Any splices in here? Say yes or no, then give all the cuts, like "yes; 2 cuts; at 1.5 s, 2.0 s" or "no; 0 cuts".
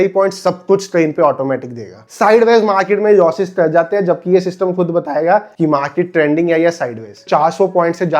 yes; 2 cuts; at 2.1 s, 7.3 s